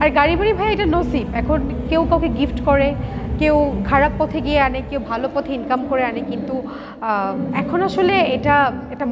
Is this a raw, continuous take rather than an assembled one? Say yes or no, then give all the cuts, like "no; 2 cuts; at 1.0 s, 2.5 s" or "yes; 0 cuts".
yes; 0 cuts